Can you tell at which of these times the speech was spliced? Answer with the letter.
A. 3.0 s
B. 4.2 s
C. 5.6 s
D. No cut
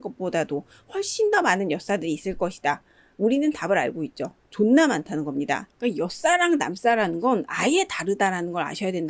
C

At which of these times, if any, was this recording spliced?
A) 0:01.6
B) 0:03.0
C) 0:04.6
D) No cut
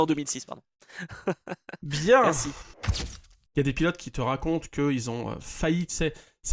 B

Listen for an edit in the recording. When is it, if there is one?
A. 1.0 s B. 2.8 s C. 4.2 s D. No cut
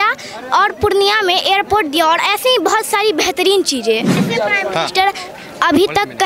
C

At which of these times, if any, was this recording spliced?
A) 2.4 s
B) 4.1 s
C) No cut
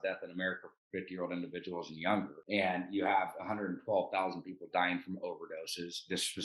A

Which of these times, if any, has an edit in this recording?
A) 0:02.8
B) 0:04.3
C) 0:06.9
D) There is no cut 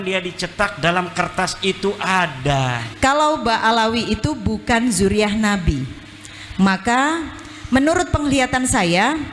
A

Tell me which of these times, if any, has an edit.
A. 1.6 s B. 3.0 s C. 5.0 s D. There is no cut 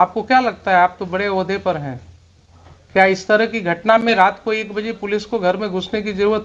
D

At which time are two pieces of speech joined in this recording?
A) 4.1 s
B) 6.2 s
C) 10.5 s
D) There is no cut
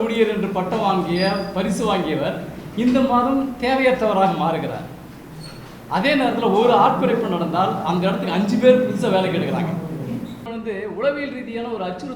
C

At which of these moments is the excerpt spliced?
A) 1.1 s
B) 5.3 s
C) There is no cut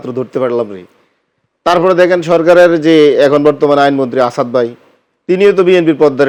C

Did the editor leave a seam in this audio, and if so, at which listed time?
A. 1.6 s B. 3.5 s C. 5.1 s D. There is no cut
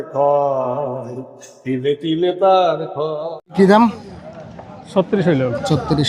B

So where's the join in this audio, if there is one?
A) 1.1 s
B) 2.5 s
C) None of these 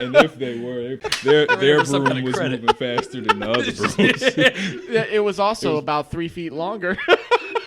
A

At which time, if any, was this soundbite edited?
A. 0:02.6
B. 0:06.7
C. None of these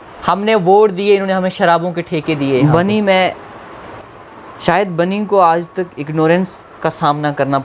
A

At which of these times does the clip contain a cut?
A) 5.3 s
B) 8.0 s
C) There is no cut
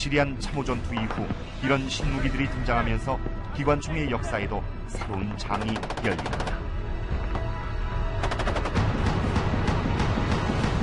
C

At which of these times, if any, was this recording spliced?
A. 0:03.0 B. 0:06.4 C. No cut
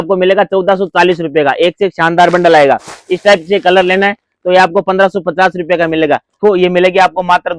B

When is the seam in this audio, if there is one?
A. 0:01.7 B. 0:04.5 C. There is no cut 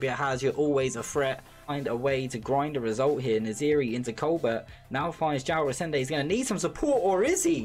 A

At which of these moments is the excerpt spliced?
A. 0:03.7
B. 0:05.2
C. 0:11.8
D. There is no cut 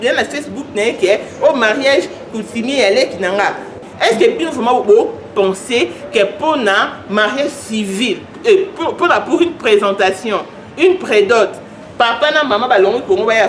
A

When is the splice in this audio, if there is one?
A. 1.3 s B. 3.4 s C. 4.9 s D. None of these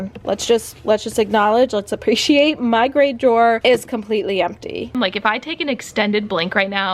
C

